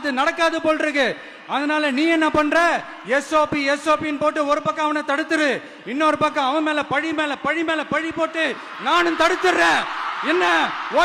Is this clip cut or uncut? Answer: uncut